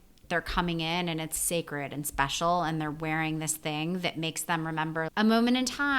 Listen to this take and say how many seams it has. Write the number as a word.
two